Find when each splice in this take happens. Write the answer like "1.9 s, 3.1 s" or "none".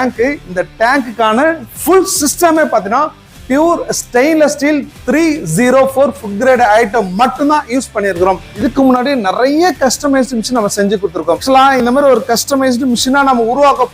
1.7 s, 8.5 s, 11.4 s